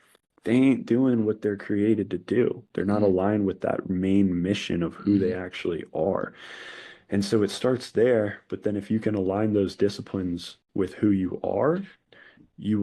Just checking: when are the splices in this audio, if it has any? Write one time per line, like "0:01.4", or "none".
none